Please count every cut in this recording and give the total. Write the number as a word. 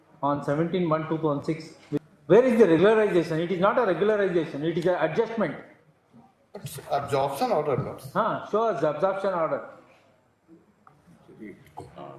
one